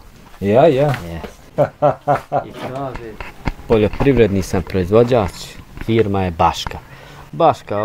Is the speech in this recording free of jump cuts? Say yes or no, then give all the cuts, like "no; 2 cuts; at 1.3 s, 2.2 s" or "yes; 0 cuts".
no; 1 cut; at 3.2 s